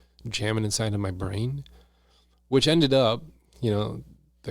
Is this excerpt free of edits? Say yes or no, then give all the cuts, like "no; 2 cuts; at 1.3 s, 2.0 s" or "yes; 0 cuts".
yes; 0 cuts